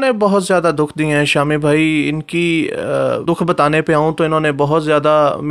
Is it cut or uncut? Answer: cut